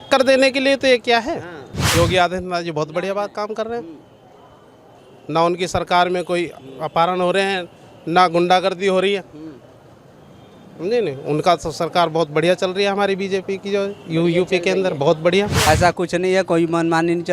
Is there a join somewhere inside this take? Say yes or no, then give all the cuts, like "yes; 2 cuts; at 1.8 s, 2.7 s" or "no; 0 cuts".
yes; 2 cuts; at 1.8 s, 15.6 s